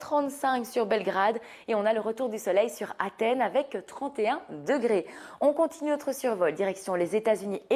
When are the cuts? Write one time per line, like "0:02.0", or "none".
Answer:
0:06.8